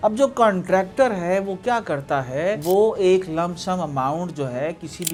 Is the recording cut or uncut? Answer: uncut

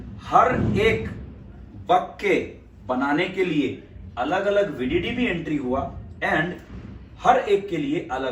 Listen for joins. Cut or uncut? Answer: uncut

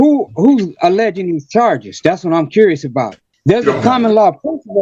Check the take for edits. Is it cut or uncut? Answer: cut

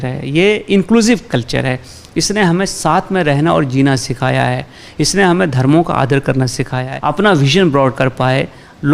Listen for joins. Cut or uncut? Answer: cut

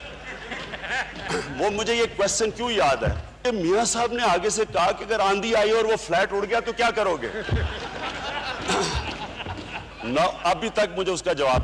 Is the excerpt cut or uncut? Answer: cut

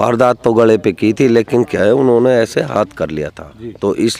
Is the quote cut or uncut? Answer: uncut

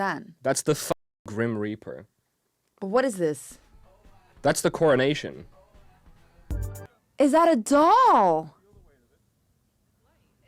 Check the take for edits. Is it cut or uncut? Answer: cut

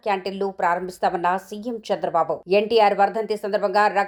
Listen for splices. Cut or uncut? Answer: uncut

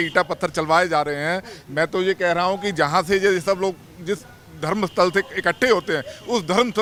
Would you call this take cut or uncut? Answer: uncut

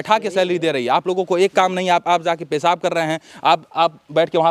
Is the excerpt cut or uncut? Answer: uncut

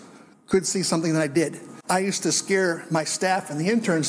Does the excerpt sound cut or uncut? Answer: cut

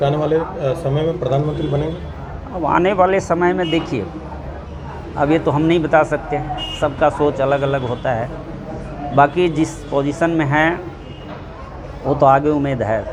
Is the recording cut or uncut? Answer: uncut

